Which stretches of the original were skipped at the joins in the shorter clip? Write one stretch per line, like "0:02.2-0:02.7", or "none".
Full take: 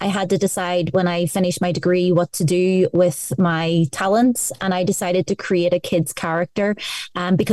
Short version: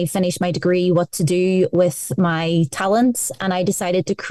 none